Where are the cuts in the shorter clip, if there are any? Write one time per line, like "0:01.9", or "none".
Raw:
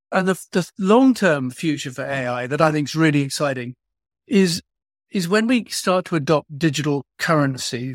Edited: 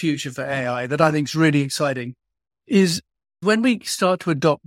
0:03.4